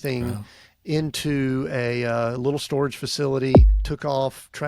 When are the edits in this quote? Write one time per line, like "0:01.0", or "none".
0:03.8